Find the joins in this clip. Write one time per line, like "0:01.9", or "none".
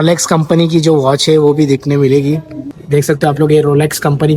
0:02.7